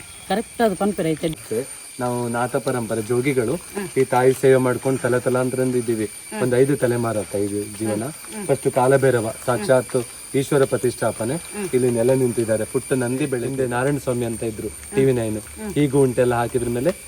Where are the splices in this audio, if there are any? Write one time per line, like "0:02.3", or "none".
0:01.3
0:13.5